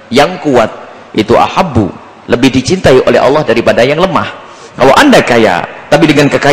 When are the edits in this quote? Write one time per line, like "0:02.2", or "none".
none